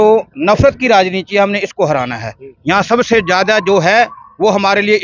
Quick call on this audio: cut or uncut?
uncut